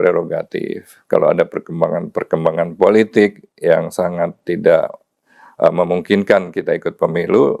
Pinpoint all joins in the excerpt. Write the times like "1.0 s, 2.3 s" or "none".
none